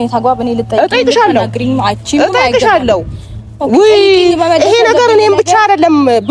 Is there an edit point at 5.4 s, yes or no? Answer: no